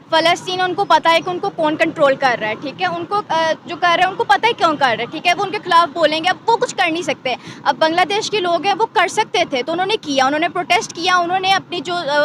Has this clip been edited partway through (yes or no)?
no